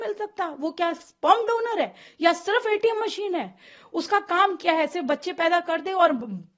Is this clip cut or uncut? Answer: uncut